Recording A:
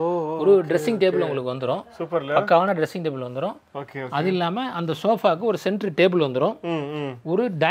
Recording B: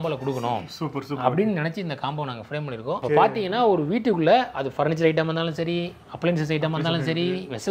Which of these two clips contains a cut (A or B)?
B